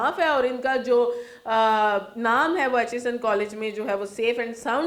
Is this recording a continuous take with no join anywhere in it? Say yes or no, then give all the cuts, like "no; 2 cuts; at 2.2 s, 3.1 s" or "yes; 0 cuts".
yes; 0 cuts